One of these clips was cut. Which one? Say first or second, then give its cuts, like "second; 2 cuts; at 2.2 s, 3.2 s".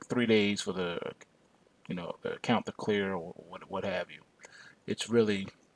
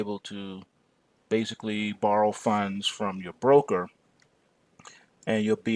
first; 1 cut; at 1.0 s